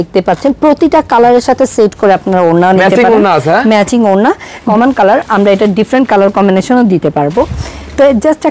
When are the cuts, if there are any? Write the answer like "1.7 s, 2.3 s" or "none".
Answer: 4.6 s